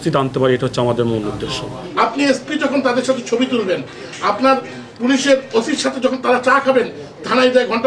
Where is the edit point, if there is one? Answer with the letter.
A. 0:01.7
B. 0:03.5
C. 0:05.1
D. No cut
A